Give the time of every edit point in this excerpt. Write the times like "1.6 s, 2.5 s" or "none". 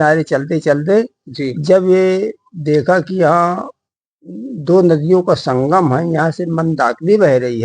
none

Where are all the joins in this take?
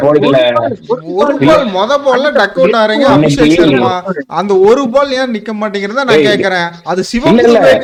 none

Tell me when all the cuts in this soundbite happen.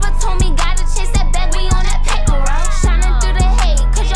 none

